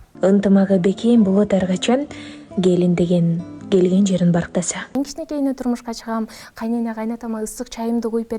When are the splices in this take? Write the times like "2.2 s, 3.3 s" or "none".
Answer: 4.9 s

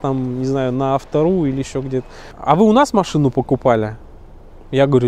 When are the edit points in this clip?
2.2 s

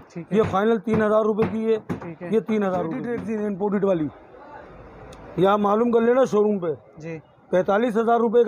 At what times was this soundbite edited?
3.2 s

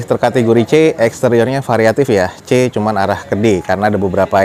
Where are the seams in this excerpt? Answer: none

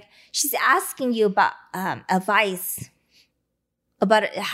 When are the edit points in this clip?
none

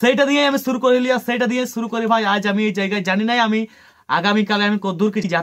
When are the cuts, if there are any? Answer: none

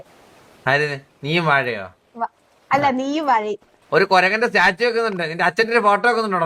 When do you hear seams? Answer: 3.8 s

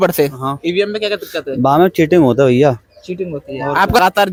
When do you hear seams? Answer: none

